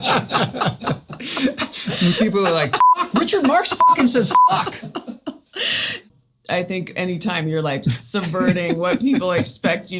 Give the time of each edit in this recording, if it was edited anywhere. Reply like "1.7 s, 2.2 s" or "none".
6.1 s